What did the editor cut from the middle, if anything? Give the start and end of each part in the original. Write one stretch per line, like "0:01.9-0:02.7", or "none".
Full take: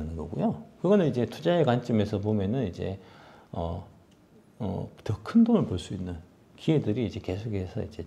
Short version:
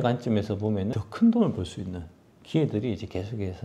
0:02.6-0:05.1